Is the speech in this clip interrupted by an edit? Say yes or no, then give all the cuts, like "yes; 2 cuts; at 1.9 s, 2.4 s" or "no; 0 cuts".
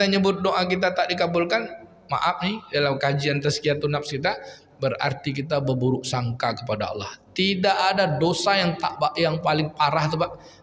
no; 0 cuts